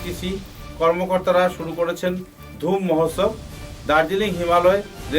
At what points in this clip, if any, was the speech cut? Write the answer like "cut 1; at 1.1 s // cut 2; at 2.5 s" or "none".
none